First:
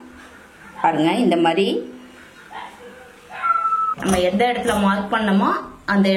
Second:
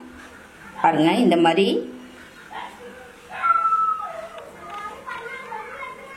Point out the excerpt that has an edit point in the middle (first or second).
first